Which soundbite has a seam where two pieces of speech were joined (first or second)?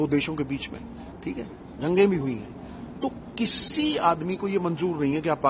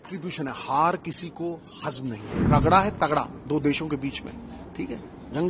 second